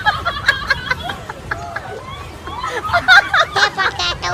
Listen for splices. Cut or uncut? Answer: cut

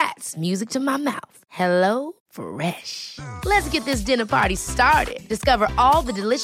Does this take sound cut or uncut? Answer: uncut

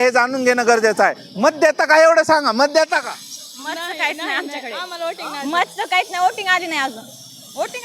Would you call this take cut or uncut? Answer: uncut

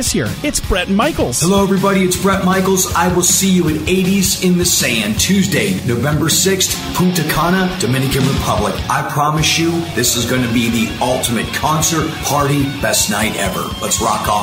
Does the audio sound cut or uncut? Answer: uncut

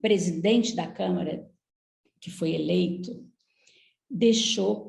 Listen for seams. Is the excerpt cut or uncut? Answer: uncut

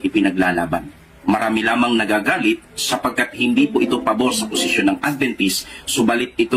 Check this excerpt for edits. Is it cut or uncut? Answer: uncut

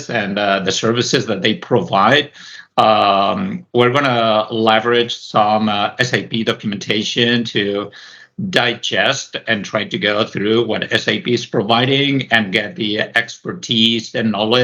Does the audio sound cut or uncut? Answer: uncut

